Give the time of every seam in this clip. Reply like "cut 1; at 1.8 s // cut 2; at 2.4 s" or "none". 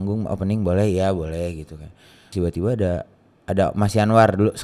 cut 1; at 2.2 s